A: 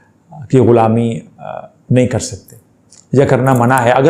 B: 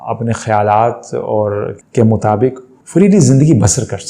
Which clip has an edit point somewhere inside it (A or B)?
B